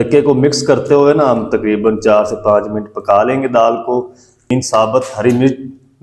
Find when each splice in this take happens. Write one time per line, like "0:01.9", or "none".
0:04.5